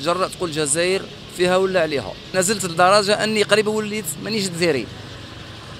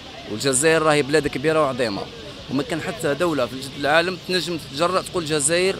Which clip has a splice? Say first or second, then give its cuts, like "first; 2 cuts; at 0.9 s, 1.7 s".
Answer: first; 1 cut; at 2.2 s